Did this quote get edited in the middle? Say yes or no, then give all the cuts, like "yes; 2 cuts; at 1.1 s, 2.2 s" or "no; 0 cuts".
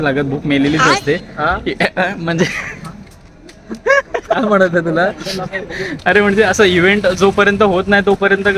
yes; 1 cut; at 1.4 s